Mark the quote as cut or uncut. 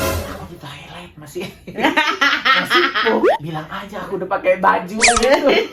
uncut